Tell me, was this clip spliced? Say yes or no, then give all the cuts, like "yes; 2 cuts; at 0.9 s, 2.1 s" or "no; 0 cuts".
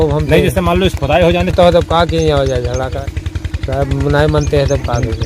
yes; 1 cut; at 2.9 s